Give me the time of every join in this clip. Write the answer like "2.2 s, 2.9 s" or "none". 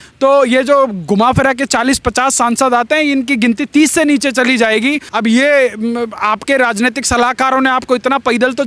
5.1 s